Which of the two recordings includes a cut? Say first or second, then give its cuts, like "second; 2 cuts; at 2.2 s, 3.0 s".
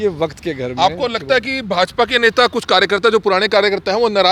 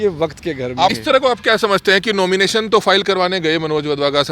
second; 1 cut; at 0.9 s